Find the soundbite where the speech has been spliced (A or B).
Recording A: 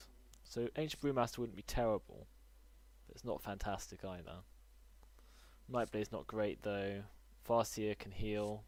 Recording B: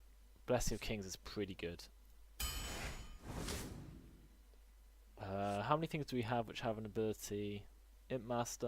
B